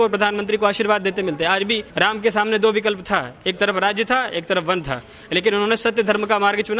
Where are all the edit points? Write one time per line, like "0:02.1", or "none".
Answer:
0:01.8